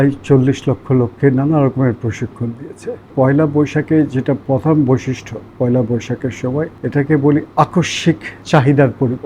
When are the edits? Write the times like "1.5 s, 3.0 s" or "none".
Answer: 3.1 s, 6.8 s, 8.3 s